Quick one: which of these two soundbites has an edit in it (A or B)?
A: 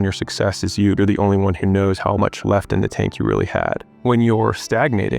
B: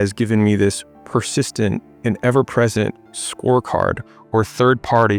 A